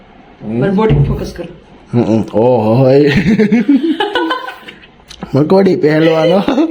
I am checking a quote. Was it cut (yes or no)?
no